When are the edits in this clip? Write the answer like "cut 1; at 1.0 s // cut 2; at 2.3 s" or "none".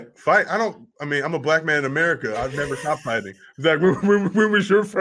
none

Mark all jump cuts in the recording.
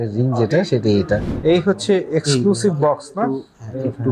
cut 1; at 1.3 s

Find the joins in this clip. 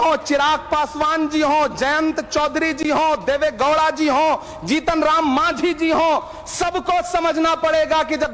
none

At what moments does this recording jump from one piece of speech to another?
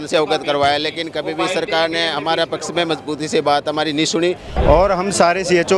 cut 1; at 4.5 s

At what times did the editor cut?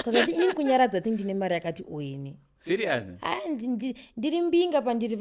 none

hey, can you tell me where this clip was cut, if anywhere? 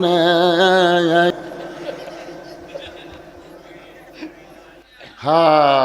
cut 1; at 1.3 s // cut 2; at 4.8 s

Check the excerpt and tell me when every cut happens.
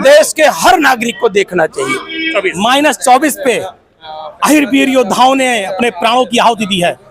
cut 1; at 2.2 s

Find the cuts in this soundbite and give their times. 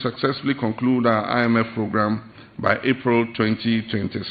none

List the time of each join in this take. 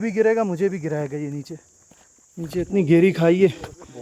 none

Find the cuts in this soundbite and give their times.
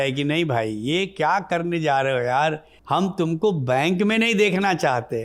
cut 1; at 2.7 s

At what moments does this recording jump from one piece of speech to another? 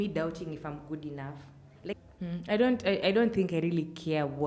cut 1; at 2.0 s

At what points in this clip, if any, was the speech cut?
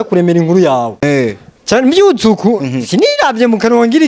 cut 1; at 1.0 s

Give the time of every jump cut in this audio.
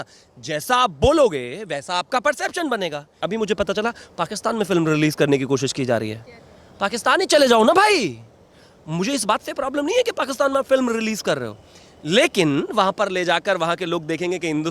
cut 1; at 3.2 s

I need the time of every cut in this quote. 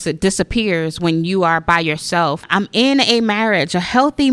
cut 1; at 2.5 s

